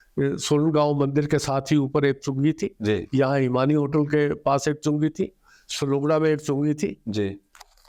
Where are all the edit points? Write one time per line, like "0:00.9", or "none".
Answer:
none